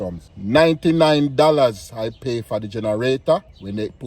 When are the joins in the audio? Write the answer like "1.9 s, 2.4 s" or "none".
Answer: none